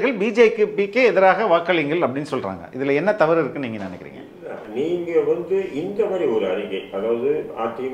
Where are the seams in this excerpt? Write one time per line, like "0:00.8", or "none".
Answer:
0:04.6